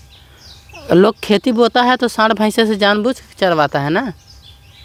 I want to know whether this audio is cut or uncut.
uncut